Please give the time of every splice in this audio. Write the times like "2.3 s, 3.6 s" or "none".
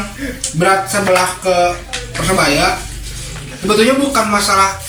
none